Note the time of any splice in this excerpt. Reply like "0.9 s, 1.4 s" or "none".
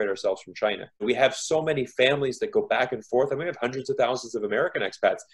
none